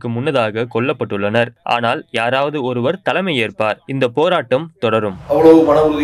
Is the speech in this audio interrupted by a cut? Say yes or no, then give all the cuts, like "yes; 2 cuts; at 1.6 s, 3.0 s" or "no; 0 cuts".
yes; 3 cuts; at 1.6 s, 3.9 s, 5.2 s